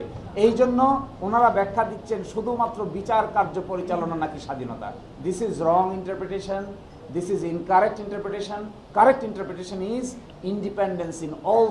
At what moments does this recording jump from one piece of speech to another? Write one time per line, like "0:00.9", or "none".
none